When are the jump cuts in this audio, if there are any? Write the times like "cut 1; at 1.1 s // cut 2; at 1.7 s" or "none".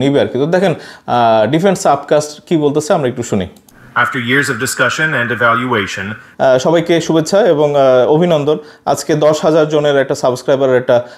cut 1; at 6.2 s